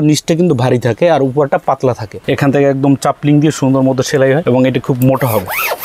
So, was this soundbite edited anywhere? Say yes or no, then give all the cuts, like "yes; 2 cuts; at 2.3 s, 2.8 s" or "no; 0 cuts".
yes; 2 cuts; at 2.1 s, 4.4 s